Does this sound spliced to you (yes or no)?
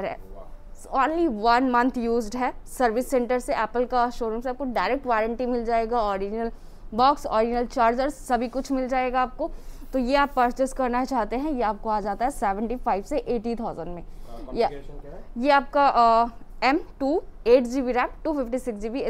no